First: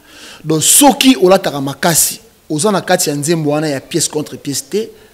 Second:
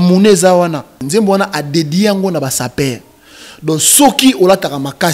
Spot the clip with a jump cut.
second; 1 cut; at 1.0 s

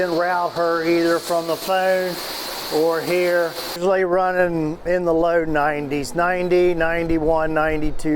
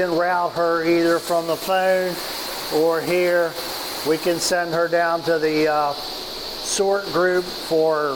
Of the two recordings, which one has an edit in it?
first; 1 cut; at 3.8 s

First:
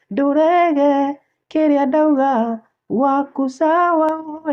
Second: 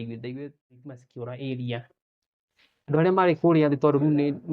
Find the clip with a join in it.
second; 1 cut; at 1.1 s

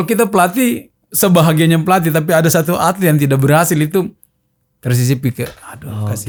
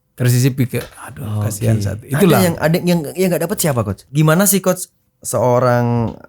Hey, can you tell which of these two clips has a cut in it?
second; 1 cut; at 4.0 s

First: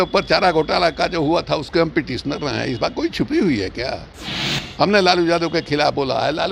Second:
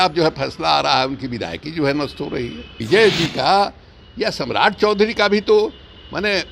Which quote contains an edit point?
second; 1 cut; at 2.8 s

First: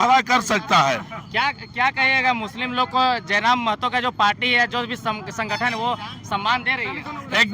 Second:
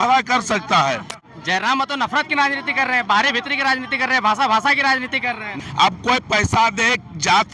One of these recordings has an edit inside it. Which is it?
second; 2 cuts; at 1.2 s, 5.5 s

